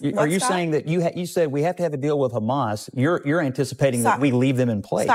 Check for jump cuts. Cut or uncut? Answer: uncut